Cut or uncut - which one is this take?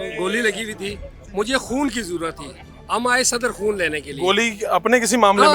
uncut